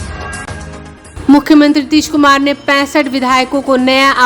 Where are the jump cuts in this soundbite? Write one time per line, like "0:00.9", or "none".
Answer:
none